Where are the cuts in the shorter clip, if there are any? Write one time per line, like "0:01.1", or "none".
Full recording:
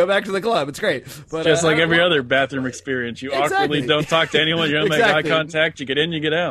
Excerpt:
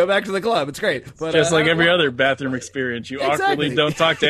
0:01.1

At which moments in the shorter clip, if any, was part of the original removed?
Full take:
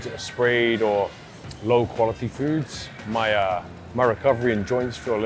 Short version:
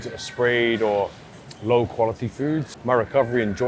0:02.7

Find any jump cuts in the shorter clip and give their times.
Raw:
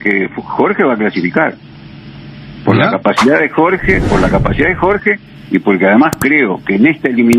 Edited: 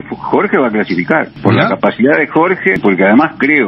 0:01.3
0:02.8

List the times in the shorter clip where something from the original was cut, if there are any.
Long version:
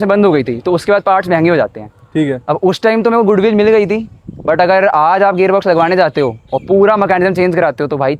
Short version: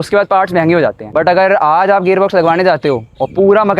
0:01.0

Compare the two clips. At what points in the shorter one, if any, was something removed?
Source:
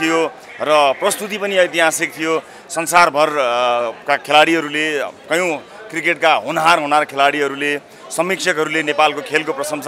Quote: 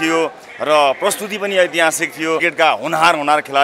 0:02.4

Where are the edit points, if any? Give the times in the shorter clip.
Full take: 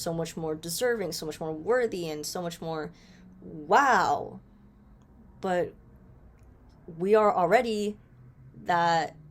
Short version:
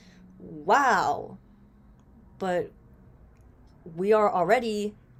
none

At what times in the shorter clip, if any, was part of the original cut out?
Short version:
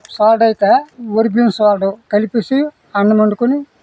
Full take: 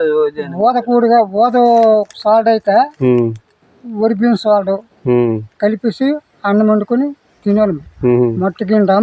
0:00.9
0:02.0

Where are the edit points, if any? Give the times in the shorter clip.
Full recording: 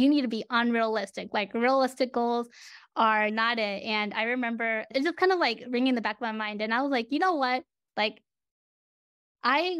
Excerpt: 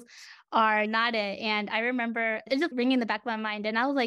0:02.7

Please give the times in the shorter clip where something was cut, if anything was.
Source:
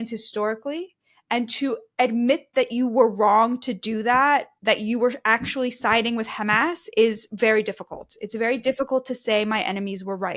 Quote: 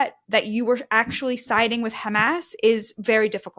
none

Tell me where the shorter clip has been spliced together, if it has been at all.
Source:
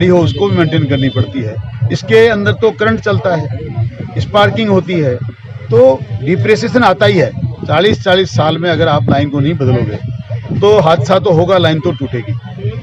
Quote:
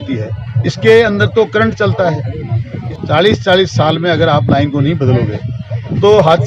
0:02.9

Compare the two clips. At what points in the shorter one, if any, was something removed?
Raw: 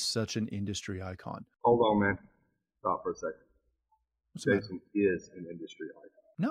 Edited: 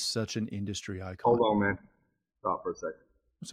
0:01.1

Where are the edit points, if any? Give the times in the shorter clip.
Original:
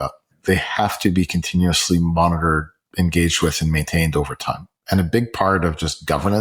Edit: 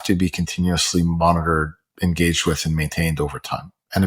none

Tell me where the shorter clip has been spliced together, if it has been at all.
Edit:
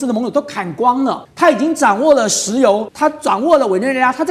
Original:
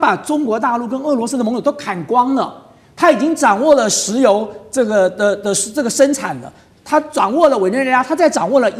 0:01.2
0:02.9

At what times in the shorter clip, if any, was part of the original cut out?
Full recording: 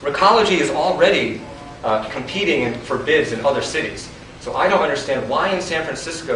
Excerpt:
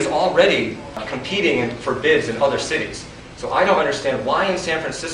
0:01.1

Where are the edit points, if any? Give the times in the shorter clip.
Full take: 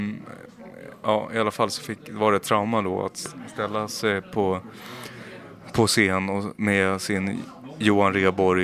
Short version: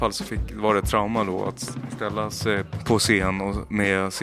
0:02.7

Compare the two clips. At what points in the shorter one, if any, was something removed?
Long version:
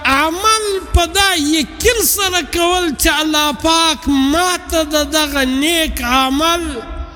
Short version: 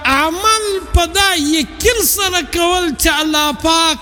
none

